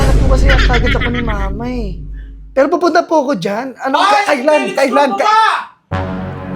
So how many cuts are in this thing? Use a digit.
0